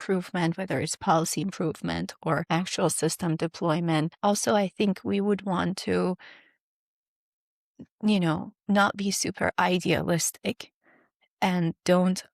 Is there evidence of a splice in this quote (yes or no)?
yes